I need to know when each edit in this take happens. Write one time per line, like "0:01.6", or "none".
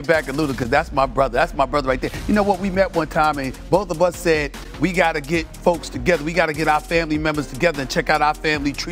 none